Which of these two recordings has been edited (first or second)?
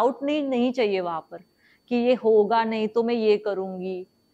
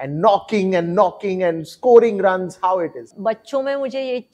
second